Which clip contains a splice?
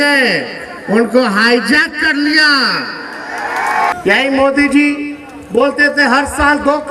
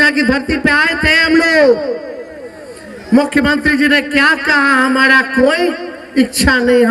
first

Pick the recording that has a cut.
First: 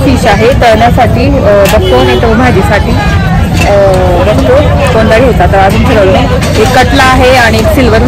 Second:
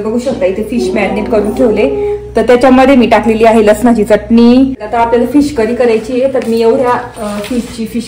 second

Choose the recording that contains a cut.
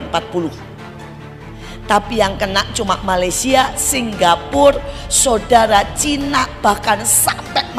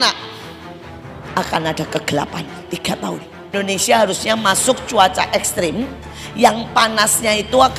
second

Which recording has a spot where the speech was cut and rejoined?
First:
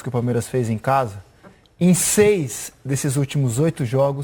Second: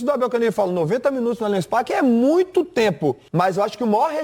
second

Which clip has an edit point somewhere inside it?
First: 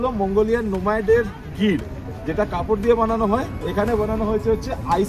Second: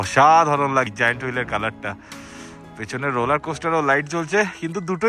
second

